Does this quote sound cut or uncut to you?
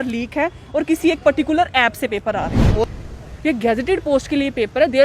cut